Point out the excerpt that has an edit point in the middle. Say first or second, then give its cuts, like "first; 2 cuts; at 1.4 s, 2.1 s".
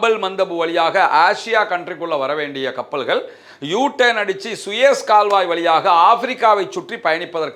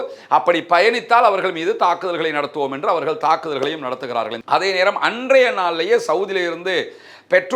second; 1 cut; at 4.4 s